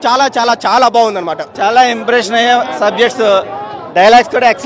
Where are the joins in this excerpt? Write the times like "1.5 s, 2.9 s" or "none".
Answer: none